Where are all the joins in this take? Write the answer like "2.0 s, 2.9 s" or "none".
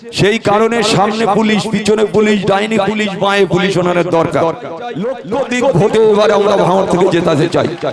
5.1 s